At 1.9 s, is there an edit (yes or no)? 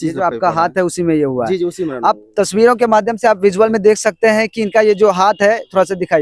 no